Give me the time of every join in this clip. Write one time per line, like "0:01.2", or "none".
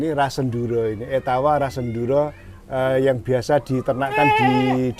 none